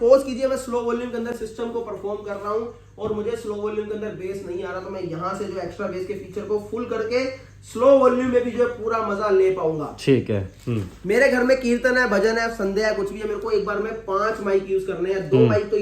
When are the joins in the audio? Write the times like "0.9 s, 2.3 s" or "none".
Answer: none

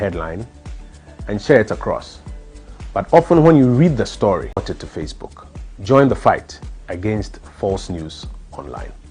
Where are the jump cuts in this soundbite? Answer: 4.6 s

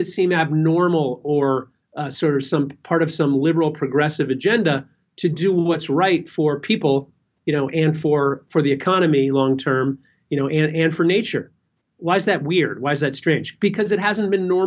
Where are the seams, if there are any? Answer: none

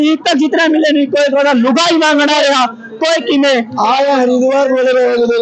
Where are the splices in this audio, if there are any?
none

